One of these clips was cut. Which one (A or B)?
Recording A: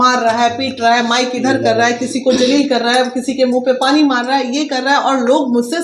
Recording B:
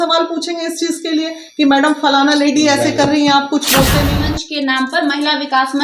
B